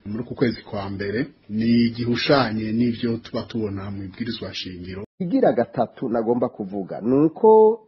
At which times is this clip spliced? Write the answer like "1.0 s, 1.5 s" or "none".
5.1 s